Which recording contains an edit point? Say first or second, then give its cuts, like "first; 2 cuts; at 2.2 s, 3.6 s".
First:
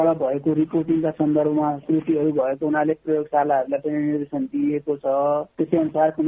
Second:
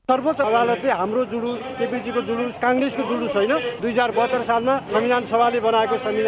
second; 1 cut; at 4.8 s